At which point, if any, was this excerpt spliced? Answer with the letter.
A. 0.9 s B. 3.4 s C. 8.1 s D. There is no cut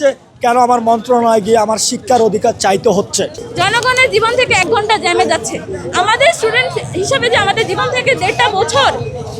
B